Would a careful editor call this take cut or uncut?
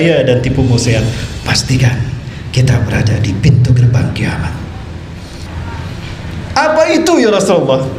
cut